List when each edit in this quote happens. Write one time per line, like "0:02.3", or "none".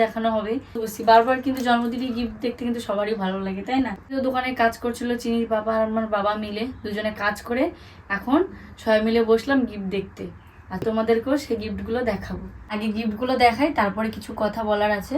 0:00.9
0:04.1
0:12.8